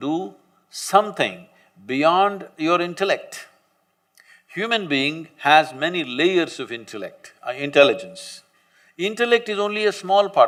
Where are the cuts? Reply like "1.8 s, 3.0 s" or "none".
none